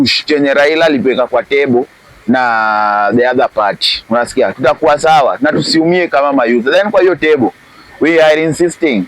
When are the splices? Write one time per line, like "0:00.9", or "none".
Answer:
none